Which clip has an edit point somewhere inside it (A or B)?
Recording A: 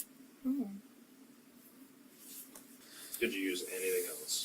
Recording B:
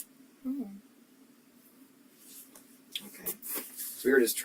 A